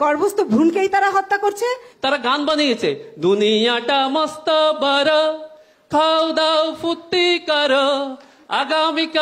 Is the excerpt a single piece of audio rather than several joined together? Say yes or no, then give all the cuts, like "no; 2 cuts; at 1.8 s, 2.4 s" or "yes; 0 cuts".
no; 1 cut; at 1.9 s